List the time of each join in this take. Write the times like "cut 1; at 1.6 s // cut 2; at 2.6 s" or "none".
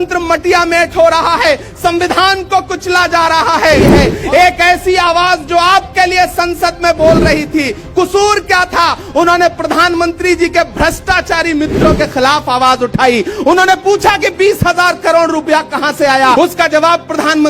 cut 1; at 3.9 s // cut 2; at 16.4 s